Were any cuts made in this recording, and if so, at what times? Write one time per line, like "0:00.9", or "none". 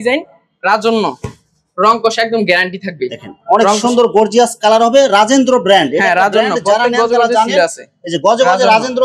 none

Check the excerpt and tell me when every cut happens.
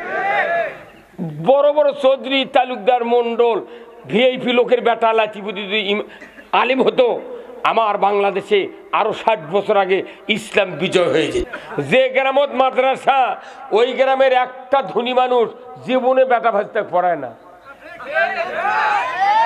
0:11.5

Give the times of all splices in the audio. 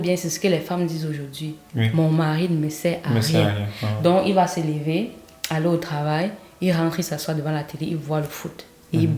none

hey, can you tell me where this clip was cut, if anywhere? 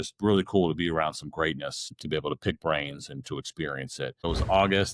0:01.9
0:04.2

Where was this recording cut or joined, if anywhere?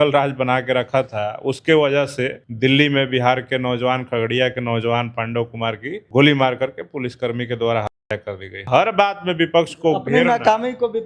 0:02.4
0:05.9
0:08.7

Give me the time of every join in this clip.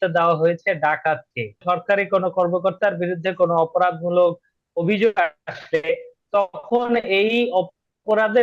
0:01.6

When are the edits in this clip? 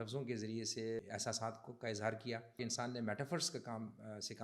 0:01.0
0:02.6

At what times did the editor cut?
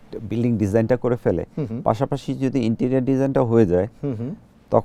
none

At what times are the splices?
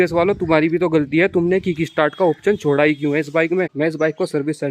0:03.7

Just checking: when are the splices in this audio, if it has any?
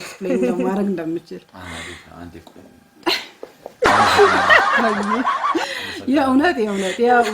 none

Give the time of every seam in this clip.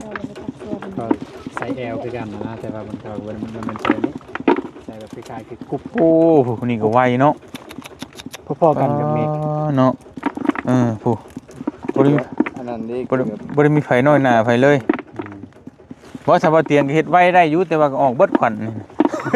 none

